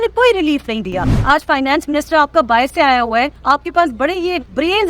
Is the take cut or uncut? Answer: cut